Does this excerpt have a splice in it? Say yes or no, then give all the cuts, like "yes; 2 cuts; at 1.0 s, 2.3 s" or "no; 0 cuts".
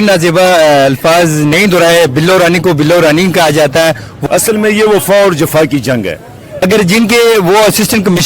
yes; 2 cuts; at 4.1 s, 6.5 s